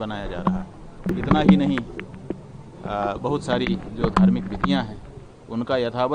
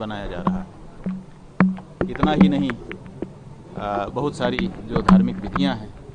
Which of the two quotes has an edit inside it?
first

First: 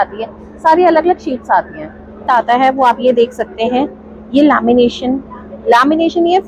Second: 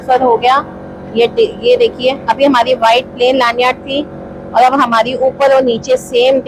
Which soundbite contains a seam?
first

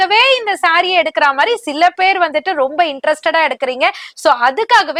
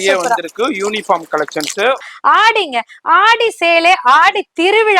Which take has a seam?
second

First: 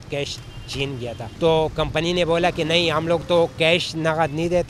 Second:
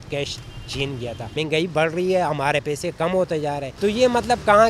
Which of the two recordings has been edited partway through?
second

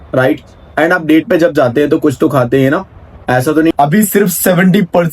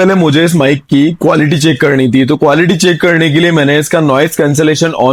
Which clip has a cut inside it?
first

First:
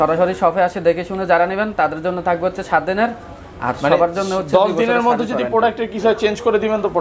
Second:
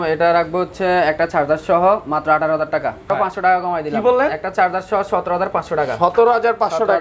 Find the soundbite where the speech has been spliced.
second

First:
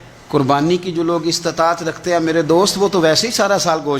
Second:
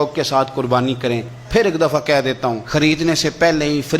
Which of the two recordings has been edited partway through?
second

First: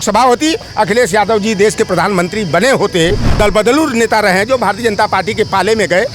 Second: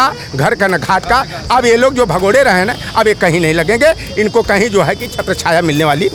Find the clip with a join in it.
first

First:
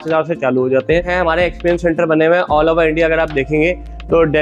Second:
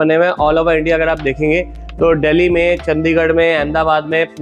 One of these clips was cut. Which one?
first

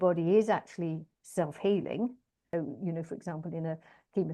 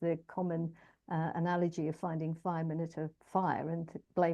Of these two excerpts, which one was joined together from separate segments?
first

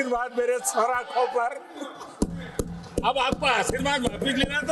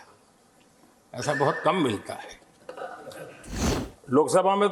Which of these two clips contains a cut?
second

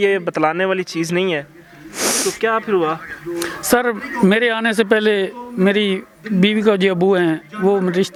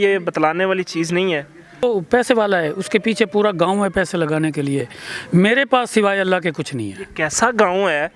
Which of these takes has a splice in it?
second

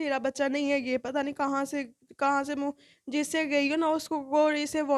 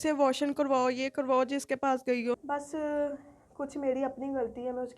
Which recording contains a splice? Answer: second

